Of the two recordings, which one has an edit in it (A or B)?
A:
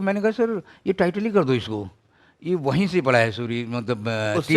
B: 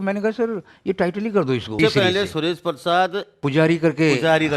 B